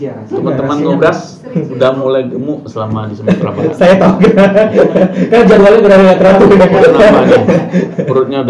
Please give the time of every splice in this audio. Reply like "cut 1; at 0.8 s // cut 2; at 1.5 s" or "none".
none

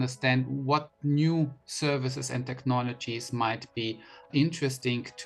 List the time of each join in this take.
none

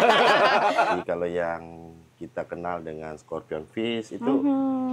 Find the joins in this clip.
cut 1; at 0.9 s

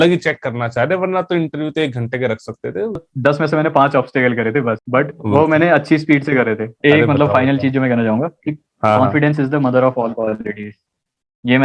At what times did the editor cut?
cut 1; at 3.1 s // cut 2; at 4.8 s // cut 3; at 6.7 s

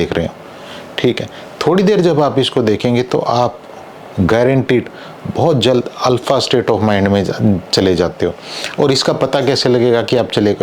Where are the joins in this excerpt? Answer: none

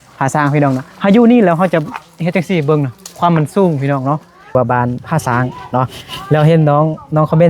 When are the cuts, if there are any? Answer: cut 1; at 4.5 s

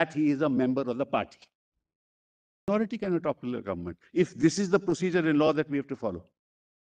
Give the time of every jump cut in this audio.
cut 1; at 2.7 s

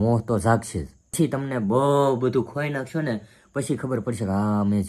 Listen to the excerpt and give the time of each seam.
cut 1; at 1.1 s

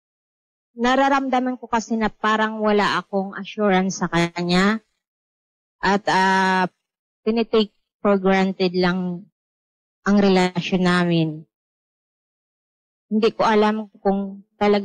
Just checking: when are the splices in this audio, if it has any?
none

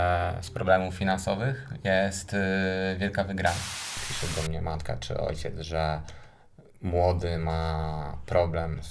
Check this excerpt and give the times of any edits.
cut 1; at 4.0 s

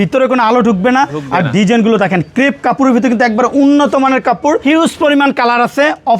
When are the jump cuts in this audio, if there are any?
cut 1; at 4.6 s

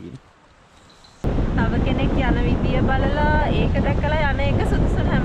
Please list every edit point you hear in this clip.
cut 1; at 1.2 s

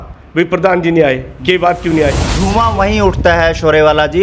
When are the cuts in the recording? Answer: cut 1; at 2.3 s

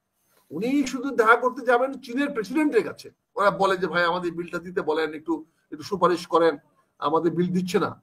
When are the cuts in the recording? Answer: cut 1; at 3.2 s

